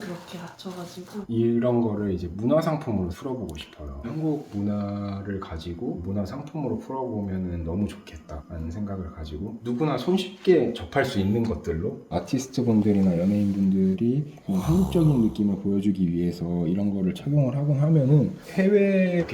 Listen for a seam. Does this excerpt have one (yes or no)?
yes